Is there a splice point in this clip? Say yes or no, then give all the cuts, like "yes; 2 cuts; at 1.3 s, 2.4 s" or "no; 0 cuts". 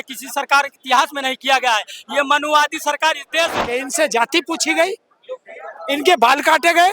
yes; 1 cut; at 3.5 s